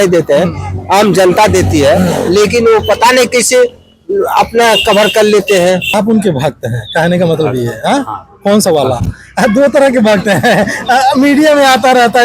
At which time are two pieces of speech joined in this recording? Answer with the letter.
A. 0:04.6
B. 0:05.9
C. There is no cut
B